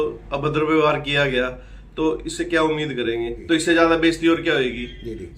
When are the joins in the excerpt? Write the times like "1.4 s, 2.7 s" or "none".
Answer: 3.3 s